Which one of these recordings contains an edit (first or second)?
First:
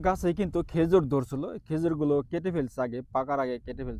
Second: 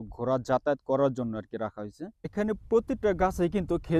second